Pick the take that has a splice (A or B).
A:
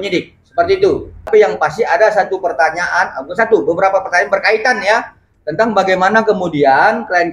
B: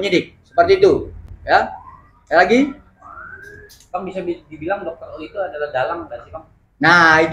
A